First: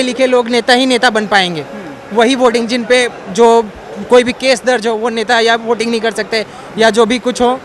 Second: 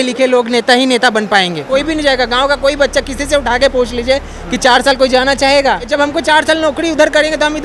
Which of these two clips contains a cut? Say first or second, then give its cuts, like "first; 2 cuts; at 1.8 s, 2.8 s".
second; 2 cuts; at 1.7 s, 5.9 s